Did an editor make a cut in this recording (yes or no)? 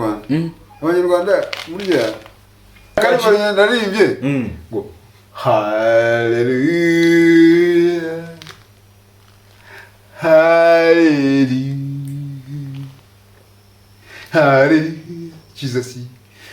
yes